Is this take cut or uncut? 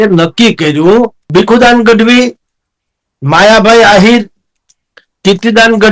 cut